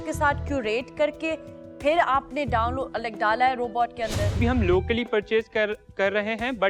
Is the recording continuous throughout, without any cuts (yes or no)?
no